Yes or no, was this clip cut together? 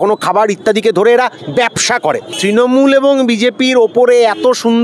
yes